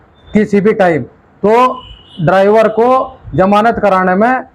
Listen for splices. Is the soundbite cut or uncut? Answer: uncut